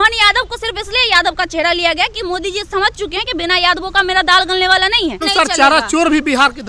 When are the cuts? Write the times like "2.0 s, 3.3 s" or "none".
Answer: 5.2 s